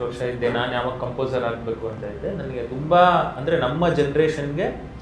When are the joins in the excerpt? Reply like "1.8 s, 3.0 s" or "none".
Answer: none